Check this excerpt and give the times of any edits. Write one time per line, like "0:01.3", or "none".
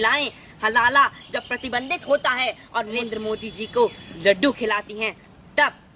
0:03.0